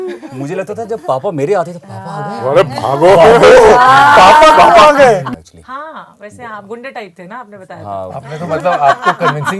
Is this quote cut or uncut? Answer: cut